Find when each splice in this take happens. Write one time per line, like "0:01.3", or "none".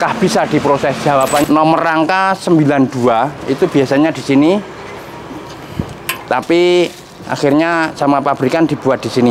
0:01.4